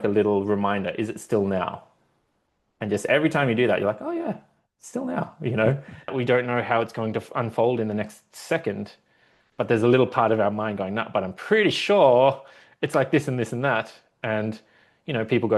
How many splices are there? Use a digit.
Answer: 1